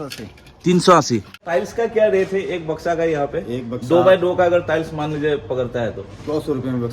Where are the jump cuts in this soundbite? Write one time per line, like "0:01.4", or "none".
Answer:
0:01.4